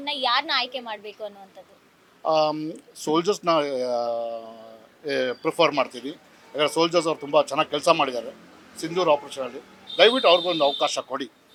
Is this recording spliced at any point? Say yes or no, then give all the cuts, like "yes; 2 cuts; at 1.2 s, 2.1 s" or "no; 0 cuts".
no; 0 cuts